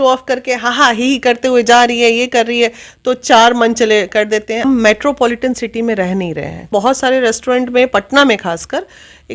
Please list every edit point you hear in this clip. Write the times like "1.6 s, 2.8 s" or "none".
4.6 s, 6.7 s

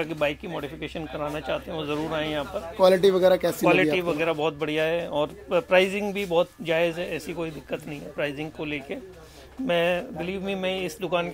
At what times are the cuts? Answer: none

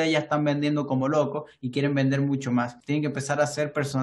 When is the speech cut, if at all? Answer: 2.8 s

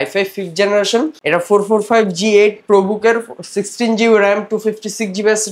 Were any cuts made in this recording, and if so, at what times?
1.2 s

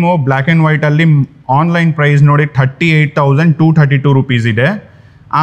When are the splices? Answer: none

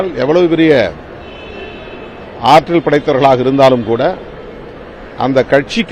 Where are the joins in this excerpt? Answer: none

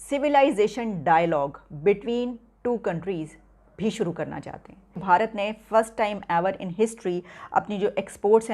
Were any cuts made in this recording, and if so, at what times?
4.9 s

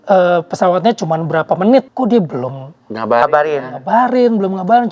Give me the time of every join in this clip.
1.9 s

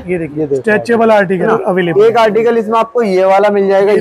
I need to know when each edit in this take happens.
1.5 s

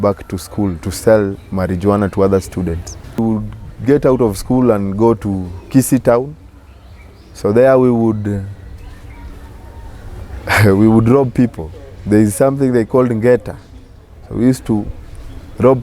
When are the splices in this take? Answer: 3.2 s

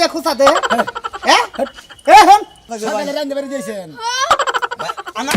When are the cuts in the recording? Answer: 2.7 s

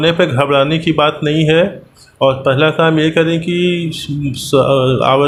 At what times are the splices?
none

